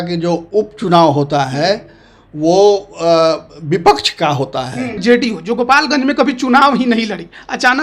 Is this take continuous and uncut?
no; 1 cut; at 5.0 s

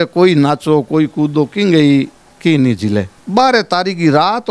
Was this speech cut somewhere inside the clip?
no; 0 cuts

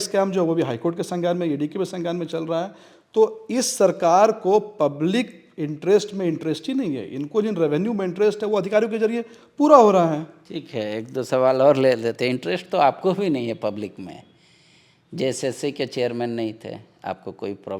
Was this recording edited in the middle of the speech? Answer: no; 0 cuts

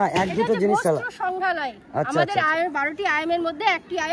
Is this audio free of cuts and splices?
yes; 0 cuts

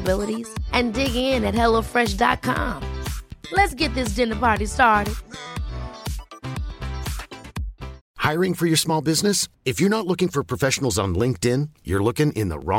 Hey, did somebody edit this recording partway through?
yes; 1 cut; at 8.0 s

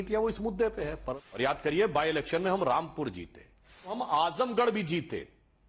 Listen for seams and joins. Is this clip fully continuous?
no; 2 cuts; at 1.2 s, 4.0 s

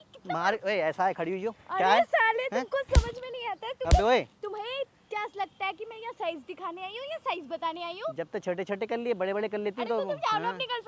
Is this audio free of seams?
yes; 0 cuts

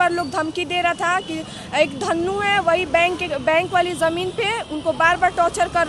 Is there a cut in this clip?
no; 0 cuts

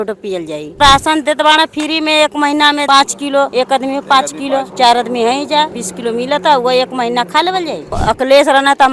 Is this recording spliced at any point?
yes; 5 cuts; at 0.8 s, 3.3 s, 4.7 s, 5.8 s, 7.9 s

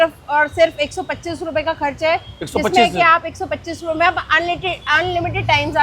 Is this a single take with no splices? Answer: yes; 0 cuts

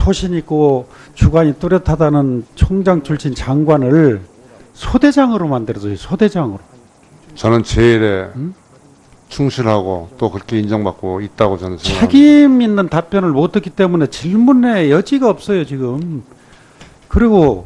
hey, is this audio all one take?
yes; 0 cuts

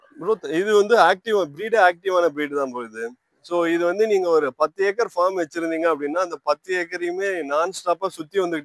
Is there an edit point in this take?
no; 0 cuts

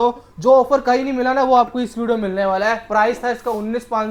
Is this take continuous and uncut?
yes; 0 cuts

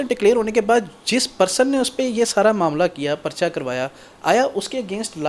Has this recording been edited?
no; 0 cuts

